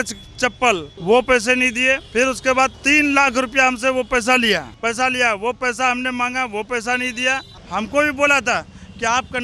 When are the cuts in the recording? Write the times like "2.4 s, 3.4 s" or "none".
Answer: 0.9 s, 4.7 s, 7.6 s